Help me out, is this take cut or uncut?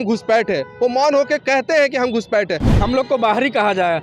cut